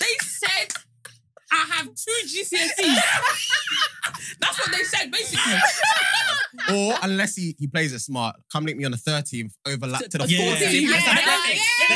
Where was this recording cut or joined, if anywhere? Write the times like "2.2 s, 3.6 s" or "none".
6.5 s